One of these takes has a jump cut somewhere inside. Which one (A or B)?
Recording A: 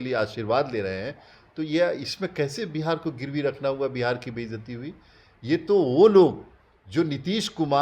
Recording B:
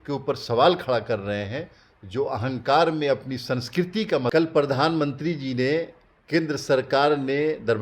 B